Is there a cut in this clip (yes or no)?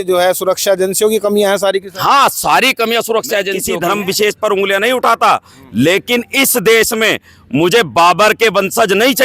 yes